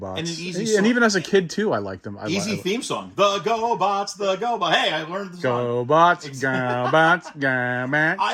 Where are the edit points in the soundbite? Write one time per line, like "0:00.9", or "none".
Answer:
none

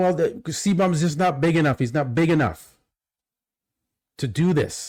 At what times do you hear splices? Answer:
none

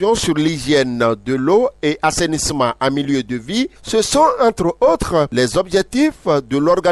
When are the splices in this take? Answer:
0:03.8
0:05.3

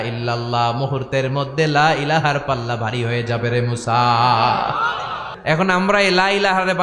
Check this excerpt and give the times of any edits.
0:05.3

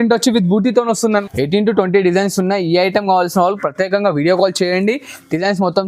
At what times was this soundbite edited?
0:01.2

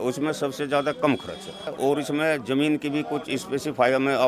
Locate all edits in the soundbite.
0:01.7

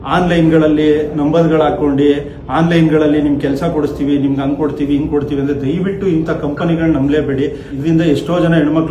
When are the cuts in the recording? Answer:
none

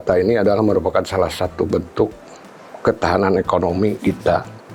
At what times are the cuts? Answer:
none

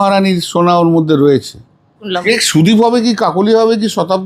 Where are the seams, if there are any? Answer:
0:02.1

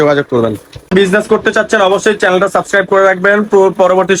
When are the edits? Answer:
none

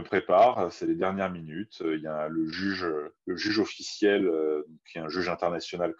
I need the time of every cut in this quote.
0:03.1

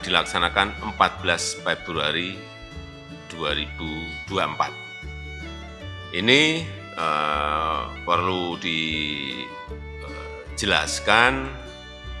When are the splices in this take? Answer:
0:09.4
0:10.6

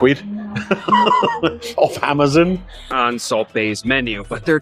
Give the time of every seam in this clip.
0:02.9

